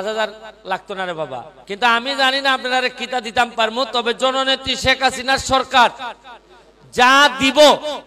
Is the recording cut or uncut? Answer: cut